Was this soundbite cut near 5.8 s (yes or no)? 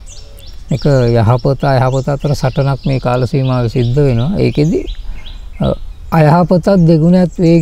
no